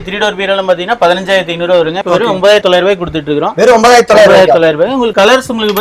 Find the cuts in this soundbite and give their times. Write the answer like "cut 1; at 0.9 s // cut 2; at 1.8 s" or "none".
none